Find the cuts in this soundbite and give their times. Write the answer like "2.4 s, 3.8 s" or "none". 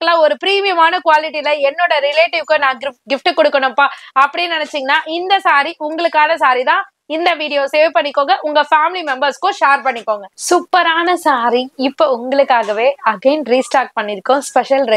none

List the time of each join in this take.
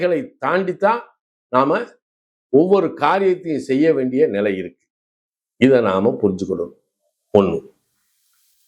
none

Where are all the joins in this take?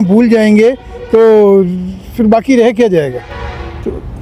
none

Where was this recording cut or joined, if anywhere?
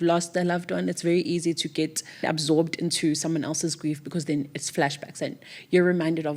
2.2 s

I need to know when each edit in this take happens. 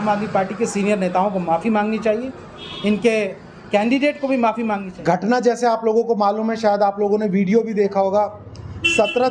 4.9 s

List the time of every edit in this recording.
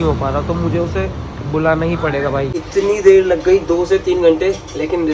2.5 s

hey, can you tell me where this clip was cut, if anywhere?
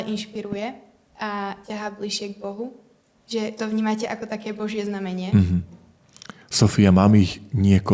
none

